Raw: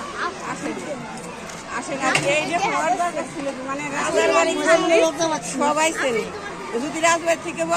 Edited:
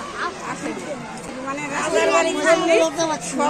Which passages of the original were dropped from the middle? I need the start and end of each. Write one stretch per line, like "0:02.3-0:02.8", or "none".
0:01.3-0:03.6